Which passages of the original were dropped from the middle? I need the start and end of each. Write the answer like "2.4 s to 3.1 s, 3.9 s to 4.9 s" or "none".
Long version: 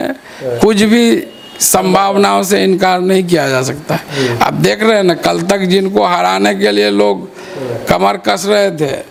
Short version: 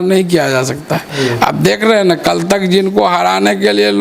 none